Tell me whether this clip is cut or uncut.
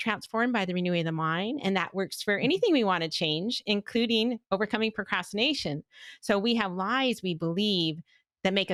uncut